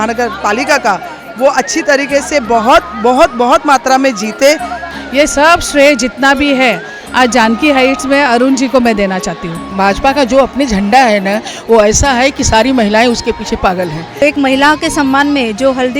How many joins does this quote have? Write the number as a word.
three